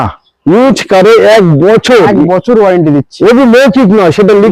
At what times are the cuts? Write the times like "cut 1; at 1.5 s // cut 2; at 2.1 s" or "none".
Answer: none